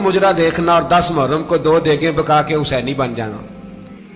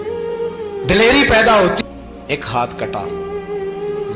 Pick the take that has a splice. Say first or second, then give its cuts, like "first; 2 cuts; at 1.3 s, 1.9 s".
second; 1 cut; at 1.8 s